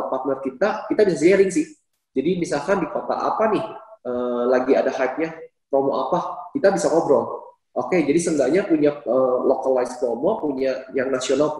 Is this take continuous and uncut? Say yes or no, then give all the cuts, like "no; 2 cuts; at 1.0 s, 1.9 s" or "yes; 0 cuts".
yes; 0 cuts